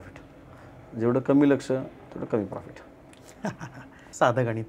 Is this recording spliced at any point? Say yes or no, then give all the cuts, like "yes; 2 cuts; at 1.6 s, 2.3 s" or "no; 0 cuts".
no; 0 cuts